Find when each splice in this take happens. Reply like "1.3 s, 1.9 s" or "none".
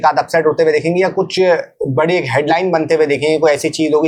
none